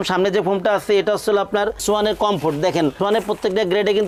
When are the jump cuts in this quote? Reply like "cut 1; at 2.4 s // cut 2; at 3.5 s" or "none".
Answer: none